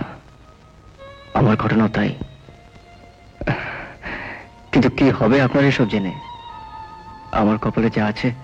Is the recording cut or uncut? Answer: uncut